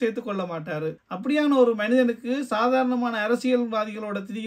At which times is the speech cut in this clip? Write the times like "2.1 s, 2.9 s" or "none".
1.0 s